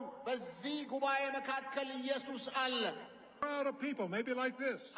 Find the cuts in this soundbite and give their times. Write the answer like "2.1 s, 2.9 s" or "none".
3.4 s